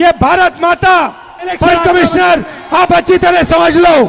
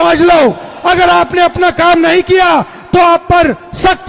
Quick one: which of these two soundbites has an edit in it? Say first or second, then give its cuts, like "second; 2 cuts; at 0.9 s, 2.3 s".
first; 1 cut; at 1.7 s